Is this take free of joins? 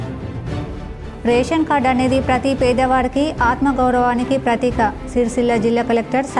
no; 1 cut; at 1.0 s

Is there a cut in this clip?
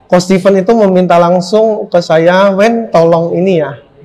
no; 0 cuts

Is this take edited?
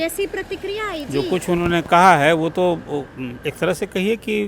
no; 0 cuts

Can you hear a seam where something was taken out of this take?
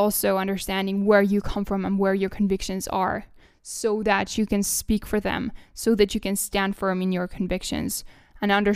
no; 0 cuts

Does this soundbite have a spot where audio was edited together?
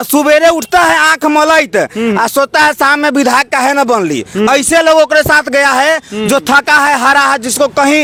no; 0 cuts

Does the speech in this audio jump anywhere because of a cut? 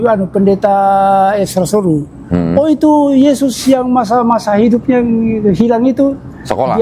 no; 0 cuts

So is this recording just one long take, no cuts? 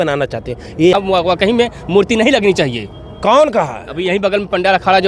no; 1 cut; at 0.9 s

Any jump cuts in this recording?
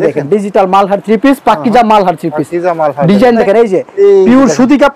yes; 1 cut; at 3.4 s

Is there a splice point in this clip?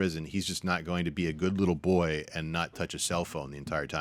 no; 0 cuts

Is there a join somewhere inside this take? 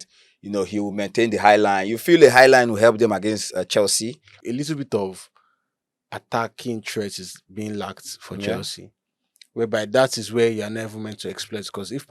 yes; 1 cut; at 4.4 s

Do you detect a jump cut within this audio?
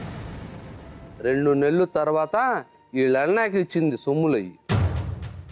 yes; 2 cuts; at 0.9 s, 4.5 s

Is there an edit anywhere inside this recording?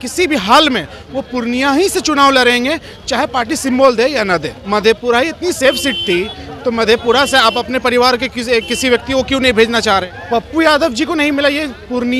yes; 2 cuts; at 4.5 s, 10.1 s

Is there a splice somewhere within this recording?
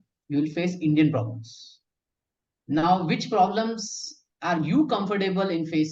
no; 0 cuts

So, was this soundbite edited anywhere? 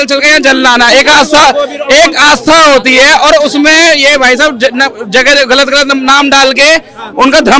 no; 0 cuts

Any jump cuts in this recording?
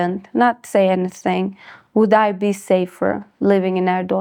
no; 0 cuts

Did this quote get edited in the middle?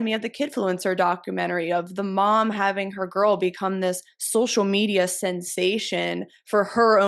no; 0 cuts

